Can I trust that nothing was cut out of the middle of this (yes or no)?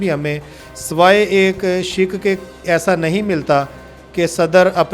yes